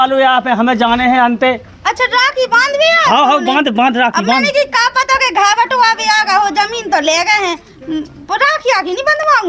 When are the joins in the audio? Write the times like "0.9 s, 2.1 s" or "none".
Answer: none